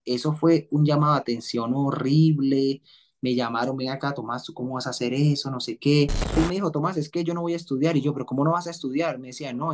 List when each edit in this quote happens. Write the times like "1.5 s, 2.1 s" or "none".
6.4 s